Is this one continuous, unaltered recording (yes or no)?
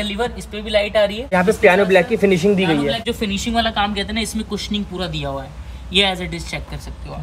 no